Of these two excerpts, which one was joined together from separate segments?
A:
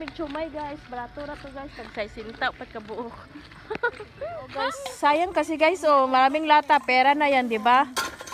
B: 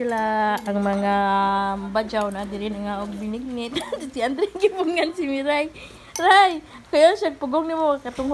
A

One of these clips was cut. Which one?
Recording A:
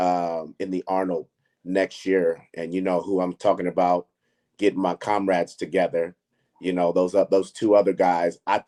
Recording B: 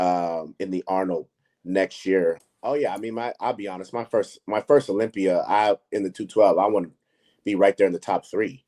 B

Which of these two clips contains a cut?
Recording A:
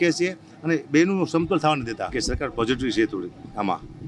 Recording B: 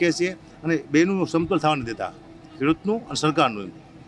A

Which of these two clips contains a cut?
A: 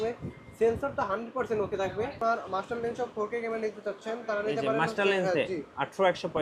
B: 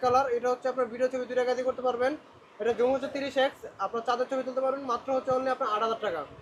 A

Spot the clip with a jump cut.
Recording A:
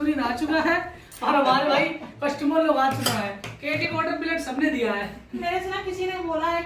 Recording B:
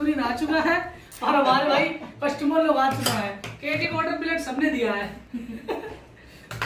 A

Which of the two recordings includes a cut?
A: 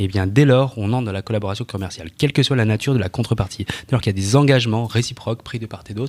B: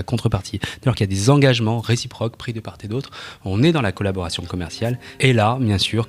B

